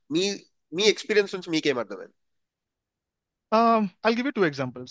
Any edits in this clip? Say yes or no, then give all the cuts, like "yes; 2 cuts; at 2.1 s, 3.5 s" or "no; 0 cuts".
no; 0 cuts